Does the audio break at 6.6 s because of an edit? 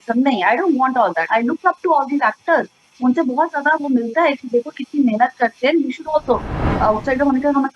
yes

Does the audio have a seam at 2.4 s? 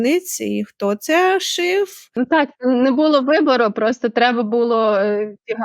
yes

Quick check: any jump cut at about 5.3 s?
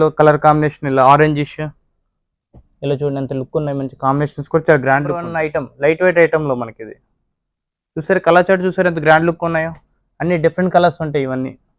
yes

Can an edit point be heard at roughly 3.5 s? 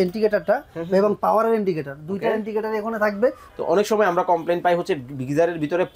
yes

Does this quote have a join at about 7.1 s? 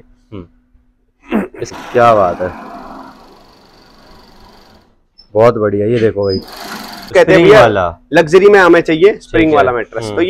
yes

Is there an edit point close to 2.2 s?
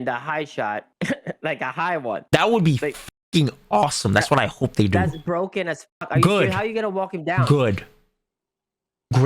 yes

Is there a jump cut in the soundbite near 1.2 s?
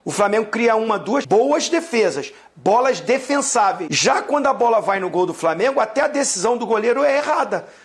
yes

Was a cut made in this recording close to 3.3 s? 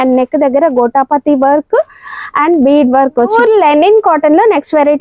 yes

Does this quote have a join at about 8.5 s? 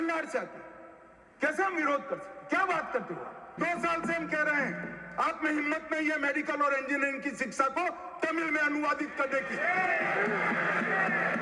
no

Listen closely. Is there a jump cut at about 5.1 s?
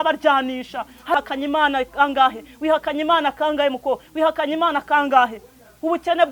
no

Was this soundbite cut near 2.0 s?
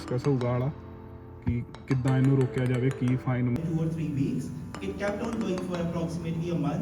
no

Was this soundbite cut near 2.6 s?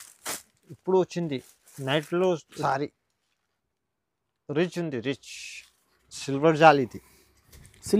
yes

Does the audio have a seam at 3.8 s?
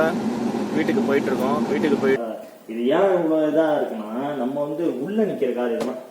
no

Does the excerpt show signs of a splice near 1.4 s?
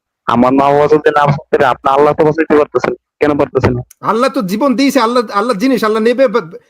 no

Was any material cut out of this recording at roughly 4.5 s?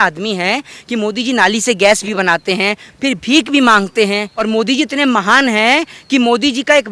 yes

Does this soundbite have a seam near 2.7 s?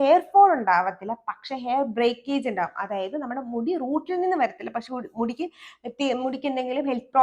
no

